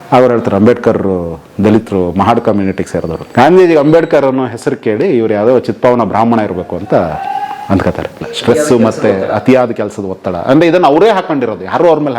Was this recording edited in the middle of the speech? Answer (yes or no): yes